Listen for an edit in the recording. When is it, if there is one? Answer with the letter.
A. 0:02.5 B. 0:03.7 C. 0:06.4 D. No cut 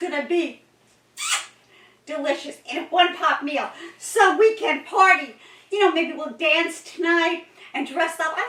D